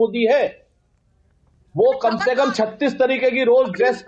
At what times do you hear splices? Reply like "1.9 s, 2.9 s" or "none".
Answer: 2.2 s